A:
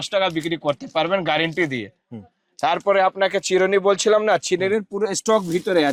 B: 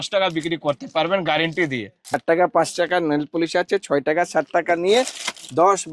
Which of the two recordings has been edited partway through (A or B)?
B